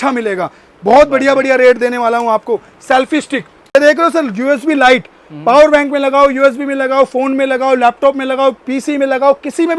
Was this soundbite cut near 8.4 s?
no; 1 cut; at 3.8 s

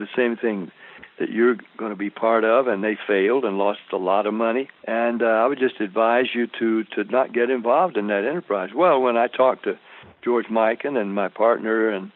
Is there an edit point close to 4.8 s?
yes; 1 cut; at 4.8 s

